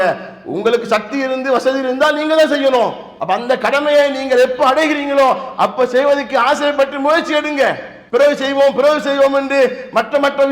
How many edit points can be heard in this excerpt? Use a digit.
2